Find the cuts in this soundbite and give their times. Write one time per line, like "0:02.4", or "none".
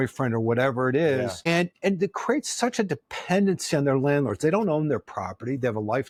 none